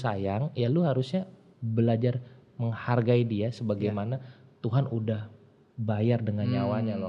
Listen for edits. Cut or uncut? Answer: uncut